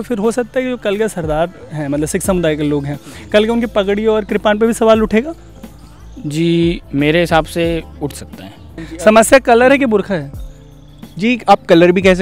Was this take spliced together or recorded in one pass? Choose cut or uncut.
cut